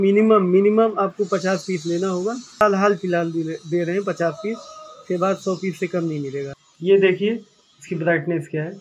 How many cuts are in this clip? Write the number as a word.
two